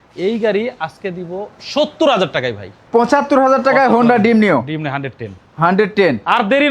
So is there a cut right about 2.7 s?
yes; 1 cut; at 2.7 s

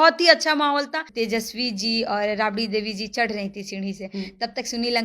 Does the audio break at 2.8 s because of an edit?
no; 1 cut; at 1.0 s

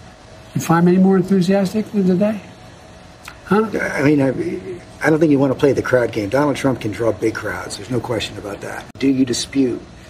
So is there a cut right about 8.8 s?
yes; 1 cut; at 8.8 s

